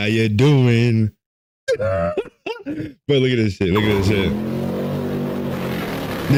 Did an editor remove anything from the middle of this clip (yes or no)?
no